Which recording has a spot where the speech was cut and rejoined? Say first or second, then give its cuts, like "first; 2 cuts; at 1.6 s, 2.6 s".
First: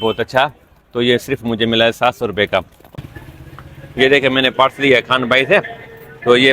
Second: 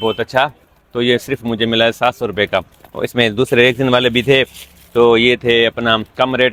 first; 1 cut; at 2.9 s